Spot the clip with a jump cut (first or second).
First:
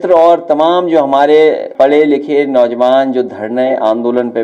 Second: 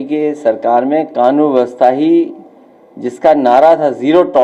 first